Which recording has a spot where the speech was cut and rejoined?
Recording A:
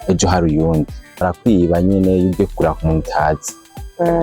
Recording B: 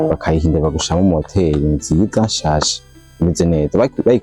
A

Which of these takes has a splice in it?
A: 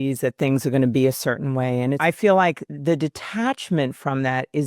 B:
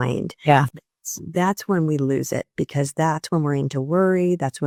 A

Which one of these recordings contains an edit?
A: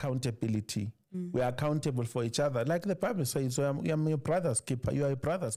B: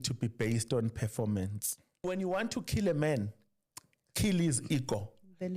B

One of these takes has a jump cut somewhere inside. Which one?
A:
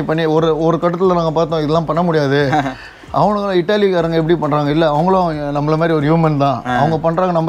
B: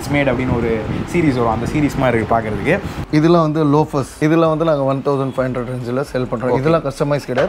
B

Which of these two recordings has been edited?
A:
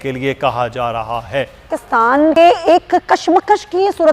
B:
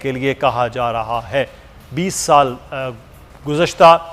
A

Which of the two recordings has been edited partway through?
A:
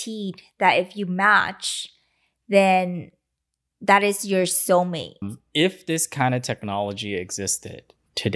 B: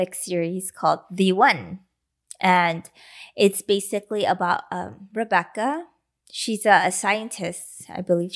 A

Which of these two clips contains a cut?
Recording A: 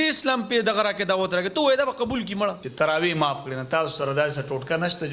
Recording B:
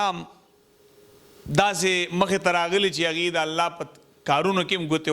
A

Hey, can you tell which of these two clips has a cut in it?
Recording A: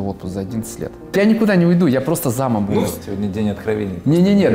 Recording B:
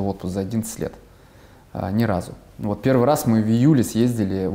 A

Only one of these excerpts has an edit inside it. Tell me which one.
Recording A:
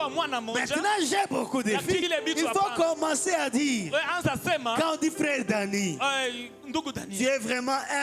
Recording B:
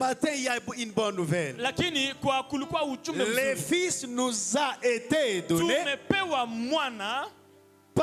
A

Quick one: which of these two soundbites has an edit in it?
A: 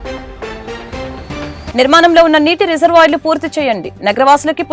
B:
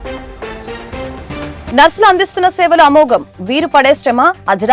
A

